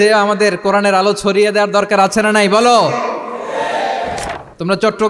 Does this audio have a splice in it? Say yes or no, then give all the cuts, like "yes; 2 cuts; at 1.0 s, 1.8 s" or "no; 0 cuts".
yes; 1 cut; at 4.2 s